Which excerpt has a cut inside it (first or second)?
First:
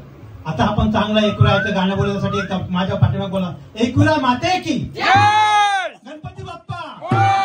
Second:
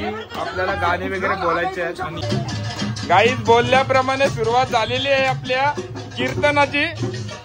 second